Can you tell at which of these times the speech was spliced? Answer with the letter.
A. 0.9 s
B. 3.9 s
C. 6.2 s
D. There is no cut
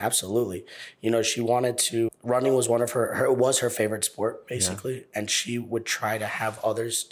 D